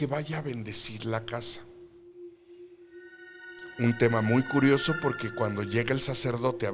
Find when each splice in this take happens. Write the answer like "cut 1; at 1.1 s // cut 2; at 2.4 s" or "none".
none

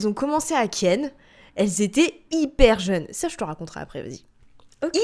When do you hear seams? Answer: none

